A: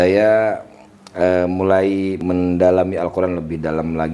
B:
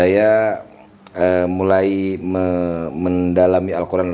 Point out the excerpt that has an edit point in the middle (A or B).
A